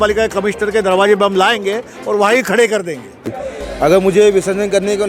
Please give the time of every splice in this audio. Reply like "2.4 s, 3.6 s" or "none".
3.3 s